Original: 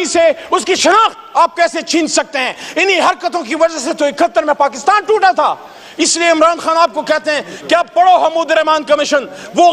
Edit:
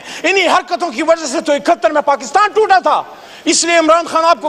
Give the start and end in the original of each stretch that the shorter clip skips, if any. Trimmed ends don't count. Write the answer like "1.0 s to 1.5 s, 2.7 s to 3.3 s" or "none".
none